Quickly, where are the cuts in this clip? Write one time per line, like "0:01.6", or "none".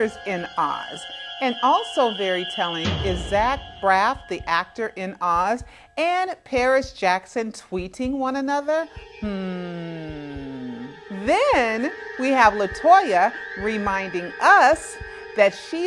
none